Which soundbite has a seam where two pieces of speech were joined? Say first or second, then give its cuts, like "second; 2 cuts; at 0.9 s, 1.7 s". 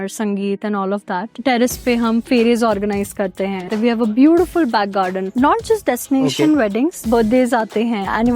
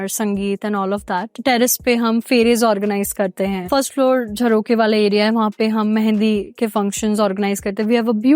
first; 3 cuts; at 3.6 s, 5.3 s, 7.0 s